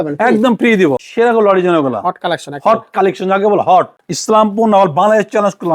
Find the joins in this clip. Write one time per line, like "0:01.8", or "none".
0:01.0
0:04.0